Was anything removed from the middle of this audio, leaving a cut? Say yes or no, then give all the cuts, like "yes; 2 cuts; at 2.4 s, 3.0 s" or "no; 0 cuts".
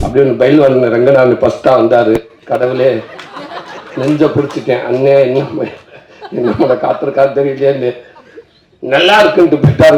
no; 0 cuts